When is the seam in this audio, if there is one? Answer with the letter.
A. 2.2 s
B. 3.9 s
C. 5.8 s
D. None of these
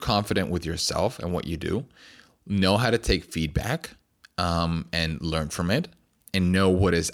D